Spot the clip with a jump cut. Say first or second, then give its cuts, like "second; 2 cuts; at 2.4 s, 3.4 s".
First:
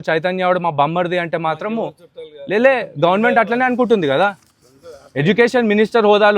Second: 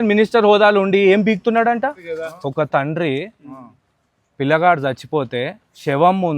second; 1 cut; at 1.9 s